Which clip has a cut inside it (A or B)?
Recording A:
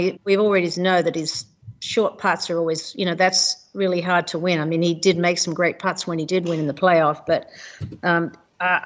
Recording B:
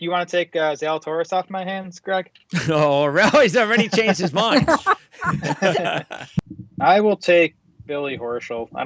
B